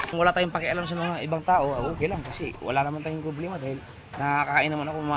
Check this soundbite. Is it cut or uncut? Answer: uncut